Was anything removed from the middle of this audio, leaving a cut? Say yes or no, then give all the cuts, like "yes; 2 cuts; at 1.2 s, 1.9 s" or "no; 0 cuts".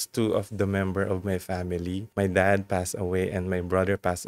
yes; 1 cut; at 2.1 s